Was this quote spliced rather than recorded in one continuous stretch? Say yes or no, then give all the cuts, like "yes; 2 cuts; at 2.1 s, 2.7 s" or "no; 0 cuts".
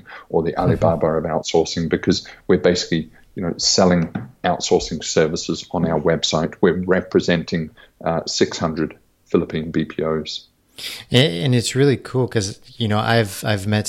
no; 0 cuts